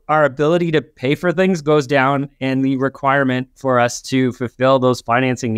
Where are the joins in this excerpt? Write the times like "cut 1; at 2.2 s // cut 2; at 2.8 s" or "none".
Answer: none